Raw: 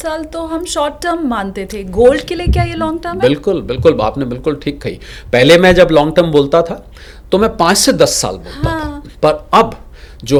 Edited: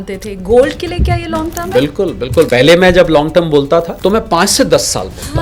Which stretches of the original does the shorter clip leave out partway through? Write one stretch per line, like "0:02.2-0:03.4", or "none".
0:03.9-0:05.3
0:06.7-0:07.2